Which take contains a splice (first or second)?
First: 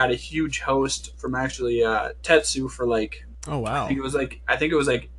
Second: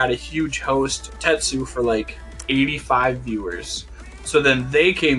second